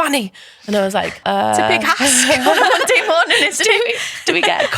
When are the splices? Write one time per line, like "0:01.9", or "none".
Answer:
0:01.2